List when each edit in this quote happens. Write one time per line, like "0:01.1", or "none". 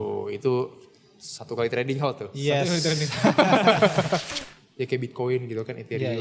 0:04.4

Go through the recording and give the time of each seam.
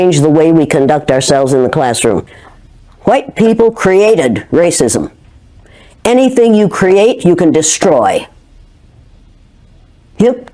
0:02.3

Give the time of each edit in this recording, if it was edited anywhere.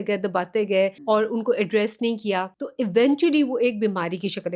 0:01.0
0:02.6

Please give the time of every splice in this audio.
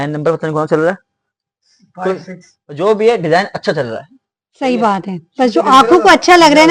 none

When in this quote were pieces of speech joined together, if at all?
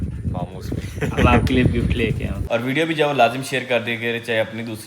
0:02.4

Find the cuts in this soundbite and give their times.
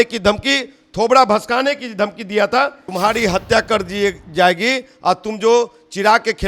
0:02.8

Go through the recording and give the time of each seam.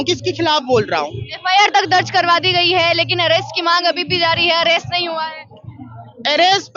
none

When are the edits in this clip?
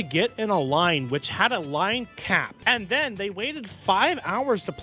0:02.5

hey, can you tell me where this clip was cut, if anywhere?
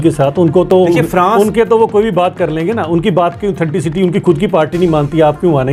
none

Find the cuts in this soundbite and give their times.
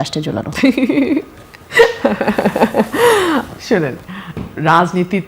none

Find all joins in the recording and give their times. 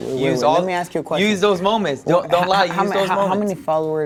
none

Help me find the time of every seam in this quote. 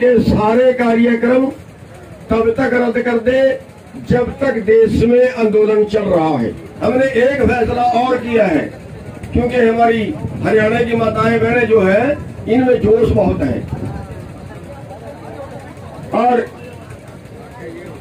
0:06.7

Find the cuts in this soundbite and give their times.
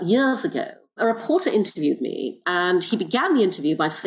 0:01.0
0:02.4

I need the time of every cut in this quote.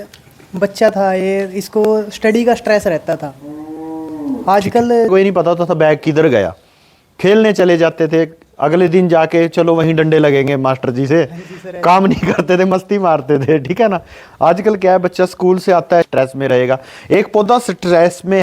0:05.1
0:16.1

